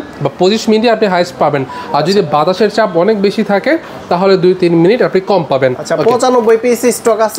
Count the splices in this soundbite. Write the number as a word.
one